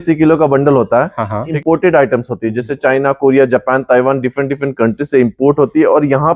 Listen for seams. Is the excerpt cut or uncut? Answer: cut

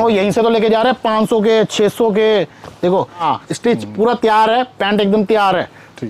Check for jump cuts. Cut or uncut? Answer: cut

